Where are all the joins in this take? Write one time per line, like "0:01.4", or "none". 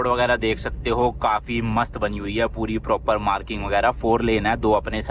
none